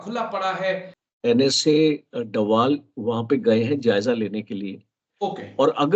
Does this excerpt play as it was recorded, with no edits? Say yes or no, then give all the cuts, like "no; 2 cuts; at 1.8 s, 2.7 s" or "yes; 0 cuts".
no; 1 cut; at 0.9 s